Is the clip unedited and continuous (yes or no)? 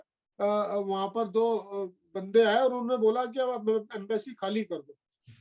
yes